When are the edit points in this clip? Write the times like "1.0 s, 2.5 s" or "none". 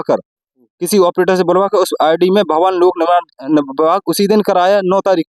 none